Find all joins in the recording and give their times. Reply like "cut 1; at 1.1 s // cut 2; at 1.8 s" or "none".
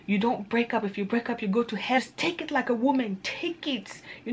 cut 1; at 2.0 s